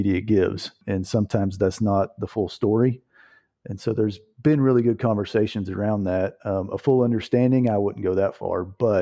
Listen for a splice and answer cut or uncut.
uncut